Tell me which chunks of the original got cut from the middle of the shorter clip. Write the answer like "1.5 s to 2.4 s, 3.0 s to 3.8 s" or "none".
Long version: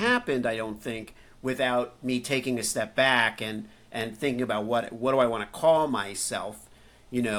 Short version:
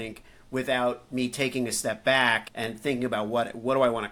3.4 s to 3.8 s